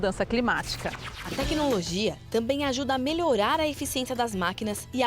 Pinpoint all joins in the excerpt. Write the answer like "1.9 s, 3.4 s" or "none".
1.2 s